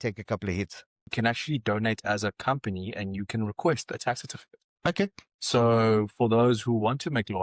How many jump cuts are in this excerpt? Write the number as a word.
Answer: one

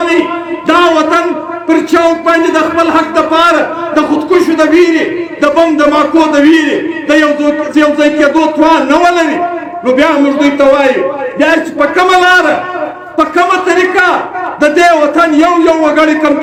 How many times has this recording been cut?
zero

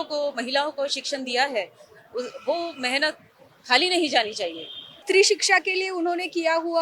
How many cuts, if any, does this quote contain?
one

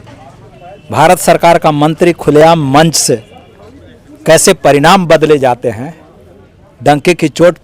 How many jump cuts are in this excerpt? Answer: zero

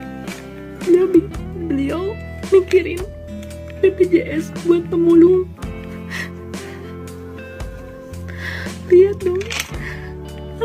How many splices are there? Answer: one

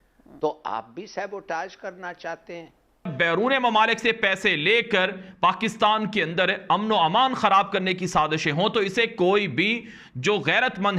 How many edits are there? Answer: one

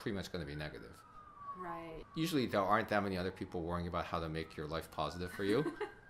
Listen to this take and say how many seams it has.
one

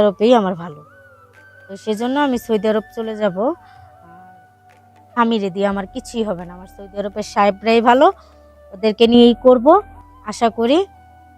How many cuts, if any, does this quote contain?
zero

